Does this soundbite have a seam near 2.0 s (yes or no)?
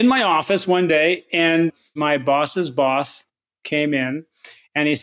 yes